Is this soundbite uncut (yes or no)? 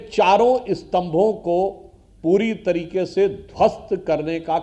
yes